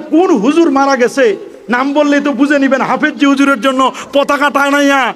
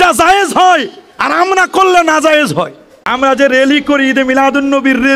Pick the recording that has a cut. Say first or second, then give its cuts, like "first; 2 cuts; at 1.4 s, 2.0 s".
second; 1 cut; at 3.0 s